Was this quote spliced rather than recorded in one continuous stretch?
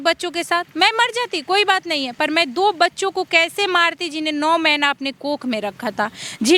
no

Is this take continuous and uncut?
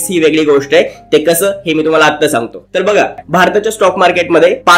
yes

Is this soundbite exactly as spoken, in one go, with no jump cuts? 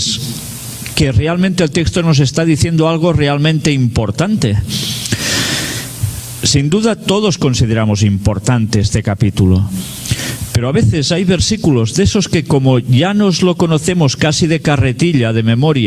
yes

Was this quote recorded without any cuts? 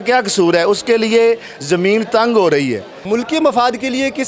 no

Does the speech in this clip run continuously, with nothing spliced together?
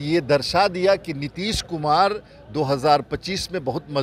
yes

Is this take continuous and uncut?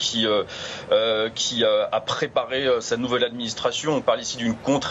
yes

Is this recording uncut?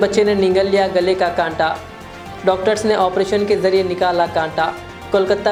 yes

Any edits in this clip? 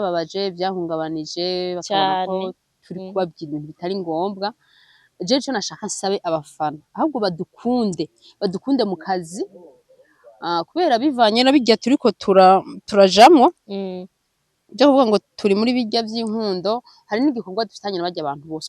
no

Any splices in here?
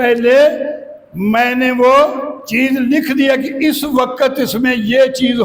no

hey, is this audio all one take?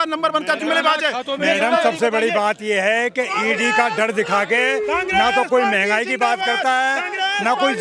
yes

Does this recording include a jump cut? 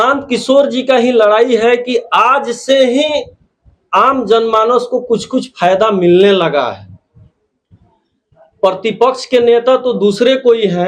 no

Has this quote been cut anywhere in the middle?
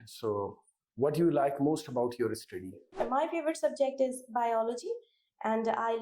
yes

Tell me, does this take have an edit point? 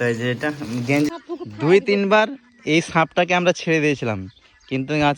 yes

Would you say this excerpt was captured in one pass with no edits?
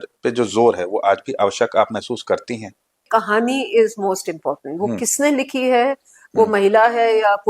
no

